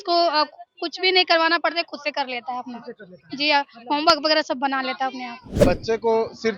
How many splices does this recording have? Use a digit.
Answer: 1